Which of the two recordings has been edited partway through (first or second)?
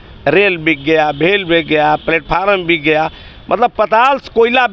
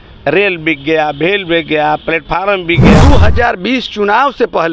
second